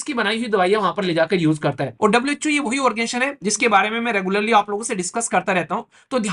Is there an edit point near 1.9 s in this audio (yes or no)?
yes